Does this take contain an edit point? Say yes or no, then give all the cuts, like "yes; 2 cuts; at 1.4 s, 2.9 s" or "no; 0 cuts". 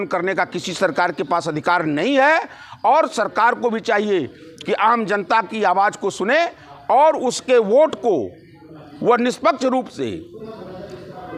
no; 0 cuts